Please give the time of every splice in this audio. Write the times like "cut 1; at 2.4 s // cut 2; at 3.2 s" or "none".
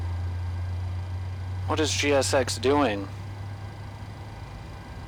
none